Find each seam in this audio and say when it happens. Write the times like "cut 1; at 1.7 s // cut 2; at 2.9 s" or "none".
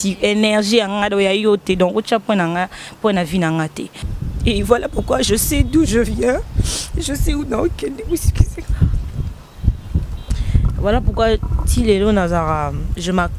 cut 1; at 4.0 s // cut 2; at 10.1 s